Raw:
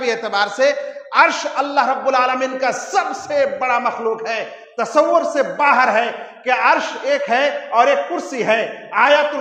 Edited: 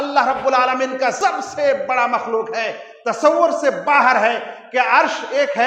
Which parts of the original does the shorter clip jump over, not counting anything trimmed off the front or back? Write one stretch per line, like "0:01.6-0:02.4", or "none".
0:02.8-0:02.9